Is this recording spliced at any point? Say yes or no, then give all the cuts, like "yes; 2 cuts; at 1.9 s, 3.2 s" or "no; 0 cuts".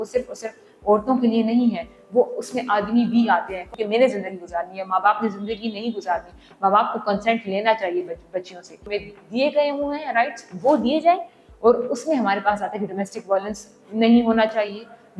yes; 2 cuts; at 3.7 s, 8.8 s